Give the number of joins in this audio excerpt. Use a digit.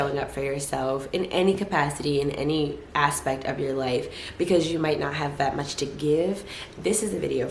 0